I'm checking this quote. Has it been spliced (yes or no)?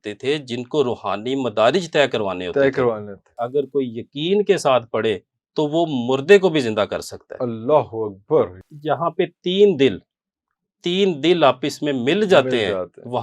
yes